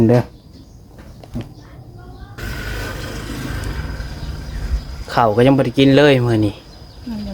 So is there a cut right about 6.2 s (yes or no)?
no